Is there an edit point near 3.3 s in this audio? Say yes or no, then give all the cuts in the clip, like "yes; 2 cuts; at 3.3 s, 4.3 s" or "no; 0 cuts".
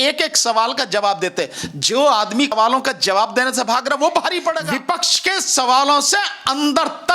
no; 1 cut; at 4.7 s